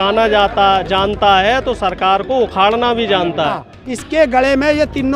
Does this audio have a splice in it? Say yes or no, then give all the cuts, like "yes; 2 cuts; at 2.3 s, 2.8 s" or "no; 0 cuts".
yes; 1 cut; at 3.5 s